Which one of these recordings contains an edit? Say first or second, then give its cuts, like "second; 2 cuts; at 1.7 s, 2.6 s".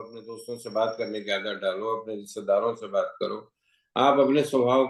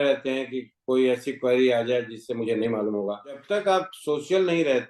second; 1 cut; at 3.4 s